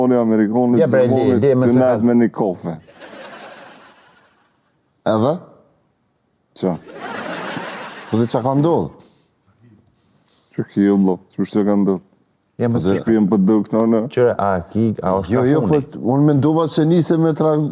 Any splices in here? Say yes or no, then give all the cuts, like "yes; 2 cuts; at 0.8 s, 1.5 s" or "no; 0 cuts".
no; 0 cuts